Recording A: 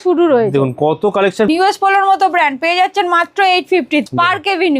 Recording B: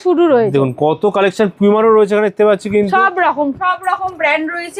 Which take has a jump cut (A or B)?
A